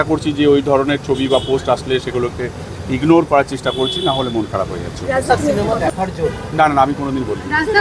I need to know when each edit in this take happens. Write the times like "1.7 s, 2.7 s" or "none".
5.3 s